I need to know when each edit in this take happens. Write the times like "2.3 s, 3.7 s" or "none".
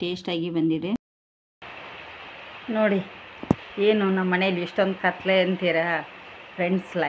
1.1 s